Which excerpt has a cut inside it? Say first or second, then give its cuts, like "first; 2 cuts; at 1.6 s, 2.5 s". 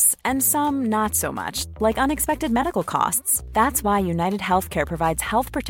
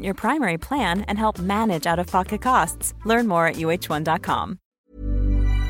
second; 1 cut; at 4.6 s